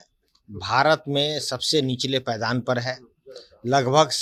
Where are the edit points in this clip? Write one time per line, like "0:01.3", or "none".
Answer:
none